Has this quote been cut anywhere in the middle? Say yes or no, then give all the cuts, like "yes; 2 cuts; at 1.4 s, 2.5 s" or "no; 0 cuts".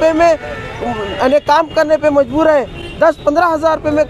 no; 0 cuts